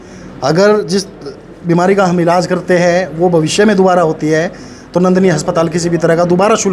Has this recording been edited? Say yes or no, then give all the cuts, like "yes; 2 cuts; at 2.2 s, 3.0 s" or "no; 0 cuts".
no; 0 cuts